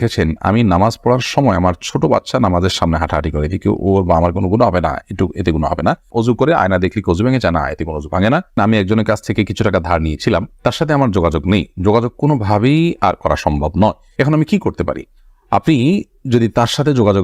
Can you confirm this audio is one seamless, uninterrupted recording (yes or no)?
yes